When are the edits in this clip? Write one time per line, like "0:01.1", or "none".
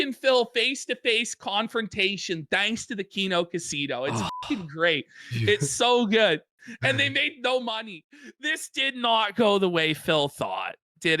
0:08.0